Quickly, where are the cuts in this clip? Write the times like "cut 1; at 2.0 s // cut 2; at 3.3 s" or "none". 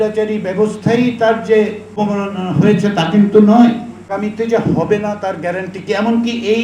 cut 1; at 2.0 s // cut 2; at 4.1 s